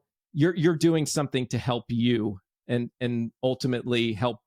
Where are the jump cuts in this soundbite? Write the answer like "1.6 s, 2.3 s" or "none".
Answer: none